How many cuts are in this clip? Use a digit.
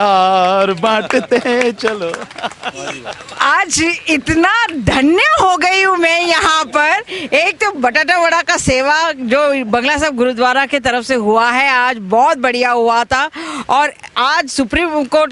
0